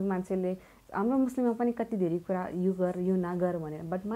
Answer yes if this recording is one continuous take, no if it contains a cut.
yes